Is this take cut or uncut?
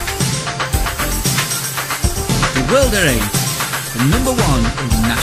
uncut